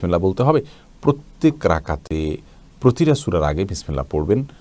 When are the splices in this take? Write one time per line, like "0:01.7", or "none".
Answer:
none